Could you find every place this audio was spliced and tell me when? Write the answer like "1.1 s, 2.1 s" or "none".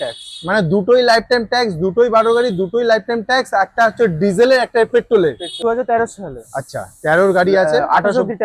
5.6 s